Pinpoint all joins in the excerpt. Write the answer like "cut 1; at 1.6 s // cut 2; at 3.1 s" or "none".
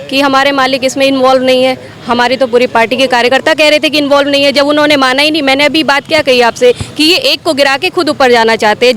none